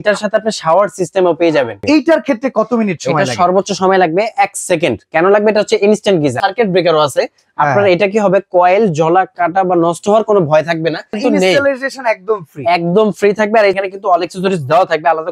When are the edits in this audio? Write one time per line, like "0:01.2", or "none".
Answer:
0:01.8
0:06.4
0:11.2
0:13.8

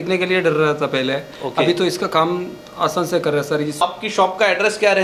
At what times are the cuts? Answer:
0:03.8

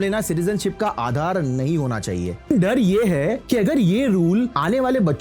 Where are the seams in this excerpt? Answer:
0:02.5

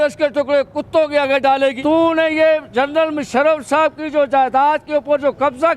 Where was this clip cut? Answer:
0:01.8

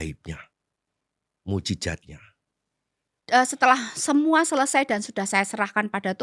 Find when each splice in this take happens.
0:03.2

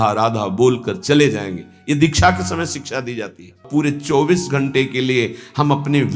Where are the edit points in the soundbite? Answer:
0:03.6

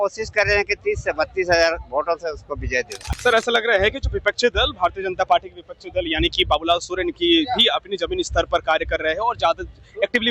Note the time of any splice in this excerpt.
0:03.0

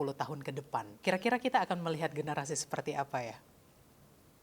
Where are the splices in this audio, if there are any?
0:00.9

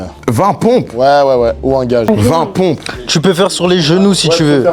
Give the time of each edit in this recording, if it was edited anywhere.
0:02.1

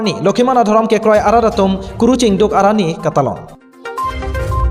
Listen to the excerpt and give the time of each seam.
none

